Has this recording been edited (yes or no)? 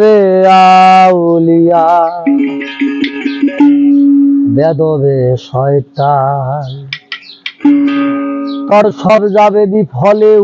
no